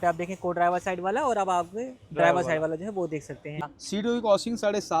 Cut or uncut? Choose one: cut